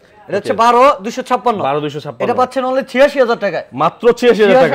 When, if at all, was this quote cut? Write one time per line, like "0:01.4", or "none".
none